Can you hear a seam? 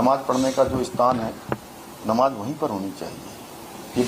no; 0 cuts

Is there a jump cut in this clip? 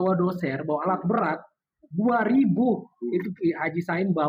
no; 0 cuts

